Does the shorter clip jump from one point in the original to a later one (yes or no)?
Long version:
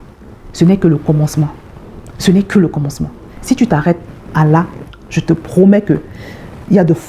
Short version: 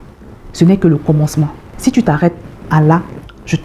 yes